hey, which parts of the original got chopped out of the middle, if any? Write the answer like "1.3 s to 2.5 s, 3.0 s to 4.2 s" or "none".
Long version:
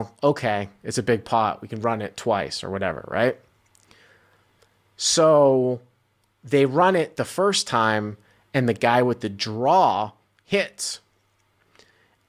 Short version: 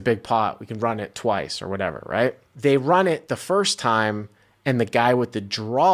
3.5 s to 6.3 s